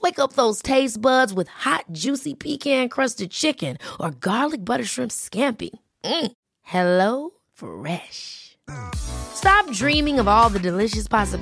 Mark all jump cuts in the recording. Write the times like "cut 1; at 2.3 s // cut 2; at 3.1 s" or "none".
none